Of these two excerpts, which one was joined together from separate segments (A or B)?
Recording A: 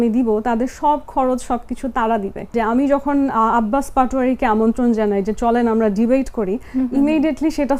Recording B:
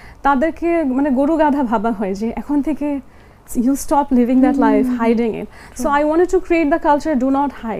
A